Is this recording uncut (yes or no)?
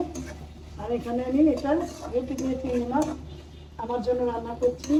yes